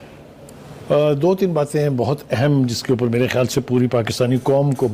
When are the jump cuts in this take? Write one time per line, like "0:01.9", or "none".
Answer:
none